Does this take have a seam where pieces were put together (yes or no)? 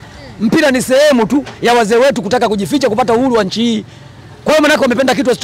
no